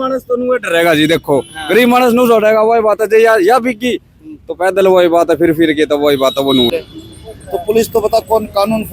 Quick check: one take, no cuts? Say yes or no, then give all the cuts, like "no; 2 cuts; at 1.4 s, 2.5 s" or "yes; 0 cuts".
no; 1 cut; at 6.7 s